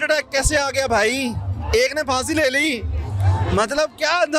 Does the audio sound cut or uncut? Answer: uncut